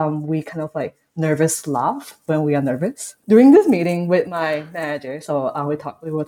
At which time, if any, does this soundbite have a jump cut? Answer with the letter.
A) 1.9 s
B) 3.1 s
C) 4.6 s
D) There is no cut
B